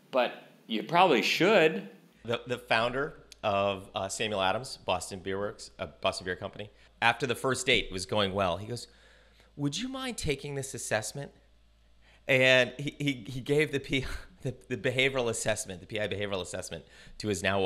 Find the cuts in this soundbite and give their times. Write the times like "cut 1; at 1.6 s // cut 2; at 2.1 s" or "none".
cut 1; at 2.2 s // cut 2; at 6.8 s